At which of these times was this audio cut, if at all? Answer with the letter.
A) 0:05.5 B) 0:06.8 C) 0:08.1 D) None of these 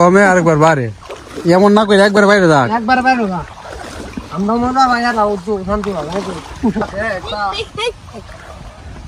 B